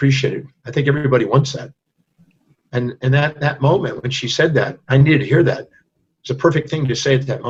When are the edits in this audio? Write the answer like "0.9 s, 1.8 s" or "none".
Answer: none